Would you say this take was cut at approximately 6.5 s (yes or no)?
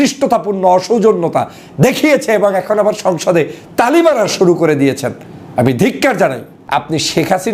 yes